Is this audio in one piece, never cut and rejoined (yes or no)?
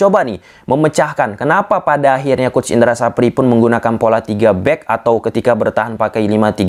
yes